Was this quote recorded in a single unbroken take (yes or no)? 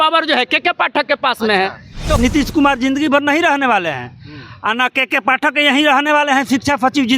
no